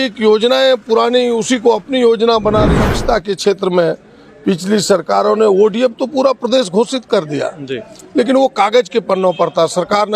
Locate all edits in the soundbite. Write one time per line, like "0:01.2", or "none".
0:02.8

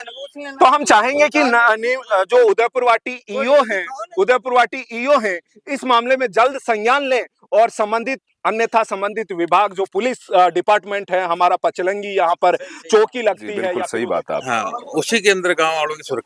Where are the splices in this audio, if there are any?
0:13.8

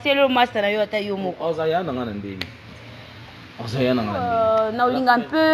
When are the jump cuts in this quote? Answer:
0:04.3

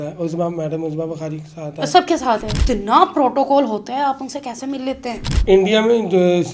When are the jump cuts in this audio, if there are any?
0:02.6
0:05.3

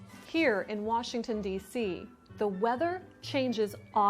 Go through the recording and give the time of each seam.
none

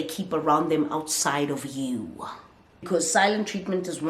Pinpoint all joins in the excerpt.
0:02.9

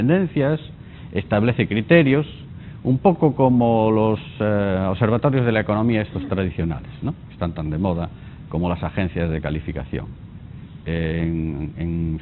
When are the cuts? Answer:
none

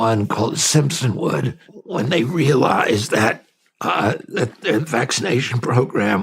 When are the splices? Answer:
0:01.6

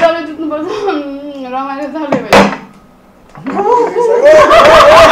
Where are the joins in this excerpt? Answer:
none

